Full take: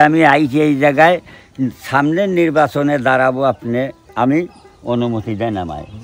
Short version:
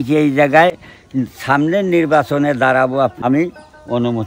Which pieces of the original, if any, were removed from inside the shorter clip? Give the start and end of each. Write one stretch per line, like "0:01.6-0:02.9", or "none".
0:03.6-0:04.1